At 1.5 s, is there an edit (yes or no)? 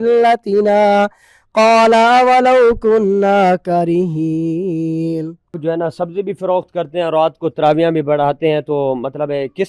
no